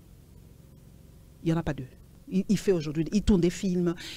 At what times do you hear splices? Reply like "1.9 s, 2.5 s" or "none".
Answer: 2.1 s